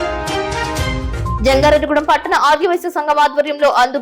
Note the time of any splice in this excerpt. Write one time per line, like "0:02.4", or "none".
0:01.4